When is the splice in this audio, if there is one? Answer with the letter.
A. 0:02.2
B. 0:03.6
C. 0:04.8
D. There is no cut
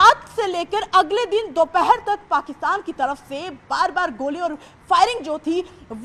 D